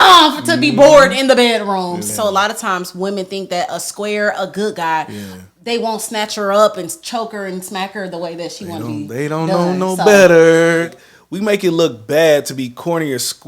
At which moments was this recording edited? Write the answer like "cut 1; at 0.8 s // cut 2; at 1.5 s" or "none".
cut 1; at 2.0 s // cut 2; at 11.0 s